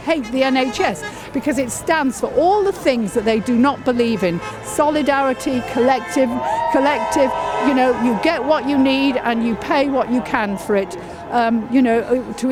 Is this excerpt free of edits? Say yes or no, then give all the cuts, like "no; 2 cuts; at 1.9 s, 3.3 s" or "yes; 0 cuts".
yes; 0 cuts